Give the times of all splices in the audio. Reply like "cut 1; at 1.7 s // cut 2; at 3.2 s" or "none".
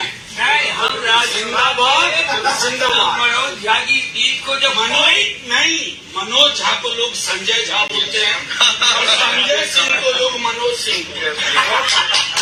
none

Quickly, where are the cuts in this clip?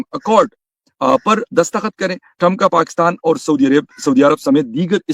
none

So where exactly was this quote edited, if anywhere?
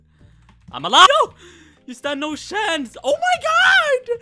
cut 1; at 1.1 s

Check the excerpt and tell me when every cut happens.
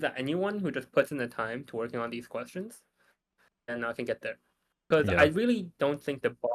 none

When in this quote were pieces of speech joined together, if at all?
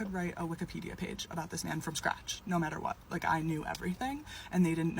cut 1; at 3.6 s

